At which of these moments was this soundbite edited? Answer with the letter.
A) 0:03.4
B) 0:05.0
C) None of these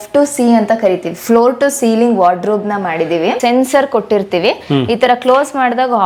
A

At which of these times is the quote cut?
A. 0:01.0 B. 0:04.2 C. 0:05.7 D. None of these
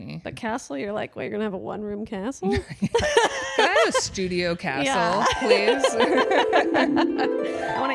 D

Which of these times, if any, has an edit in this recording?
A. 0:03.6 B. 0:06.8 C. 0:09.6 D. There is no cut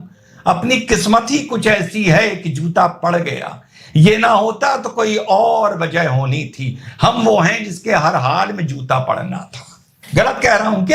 D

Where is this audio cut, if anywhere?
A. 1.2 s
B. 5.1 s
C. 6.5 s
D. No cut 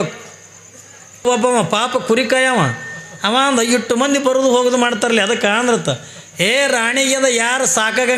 A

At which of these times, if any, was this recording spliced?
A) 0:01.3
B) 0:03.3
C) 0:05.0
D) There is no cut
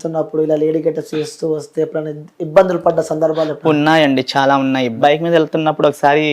C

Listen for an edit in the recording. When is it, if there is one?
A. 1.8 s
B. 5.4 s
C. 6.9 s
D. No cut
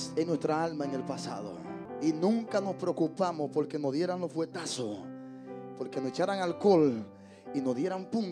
A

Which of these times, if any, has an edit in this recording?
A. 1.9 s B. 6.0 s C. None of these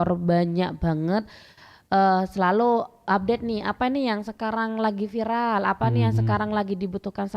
C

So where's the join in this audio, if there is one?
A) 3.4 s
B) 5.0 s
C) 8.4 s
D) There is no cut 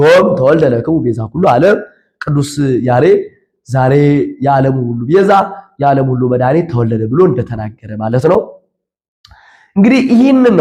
D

